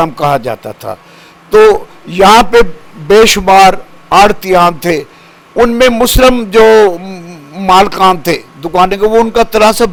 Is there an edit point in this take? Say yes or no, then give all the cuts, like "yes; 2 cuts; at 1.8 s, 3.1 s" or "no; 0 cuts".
no; 0 cuts